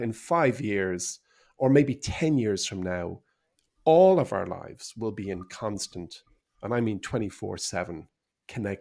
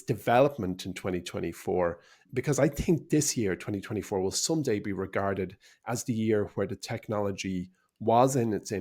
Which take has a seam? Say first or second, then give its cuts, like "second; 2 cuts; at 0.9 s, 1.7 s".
second; 1 cut; at 2.2 s